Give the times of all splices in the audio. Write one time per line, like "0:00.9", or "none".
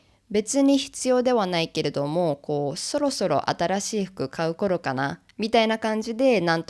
none